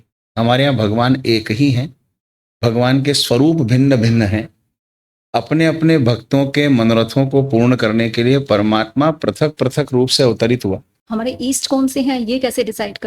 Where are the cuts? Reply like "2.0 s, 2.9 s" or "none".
10.9 s